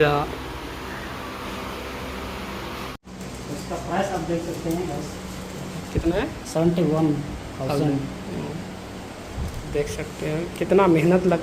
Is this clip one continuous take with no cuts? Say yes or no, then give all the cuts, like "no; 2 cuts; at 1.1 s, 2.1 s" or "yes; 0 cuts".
no; 1 cut; at 2.9 s